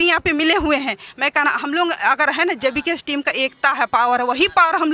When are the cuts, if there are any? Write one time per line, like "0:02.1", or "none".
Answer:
none